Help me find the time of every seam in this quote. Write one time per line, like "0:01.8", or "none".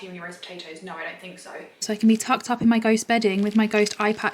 0:01.8